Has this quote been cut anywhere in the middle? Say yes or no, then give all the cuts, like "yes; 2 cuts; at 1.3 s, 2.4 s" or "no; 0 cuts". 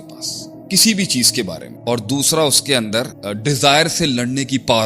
yes; 2 cuts; at 1.7 s, 3.2 s